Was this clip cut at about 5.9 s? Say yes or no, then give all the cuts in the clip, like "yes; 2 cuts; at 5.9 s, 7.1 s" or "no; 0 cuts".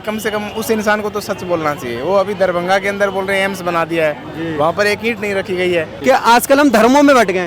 yes; 1 cut; at 5.9 s